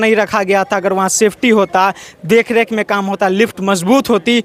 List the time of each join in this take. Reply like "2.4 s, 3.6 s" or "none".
none